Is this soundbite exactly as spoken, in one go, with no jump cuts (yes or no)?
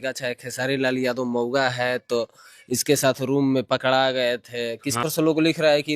no